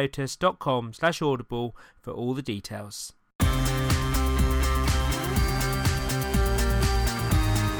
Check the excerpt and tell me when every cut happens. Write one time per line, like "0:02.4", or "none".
0:03.3